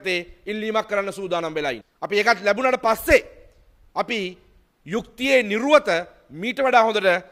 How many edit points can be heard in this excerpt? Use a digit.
1